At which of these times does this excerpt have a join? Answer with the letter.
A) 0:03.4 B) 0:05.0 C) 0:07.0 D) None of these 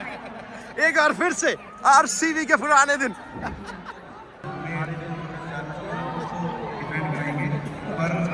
D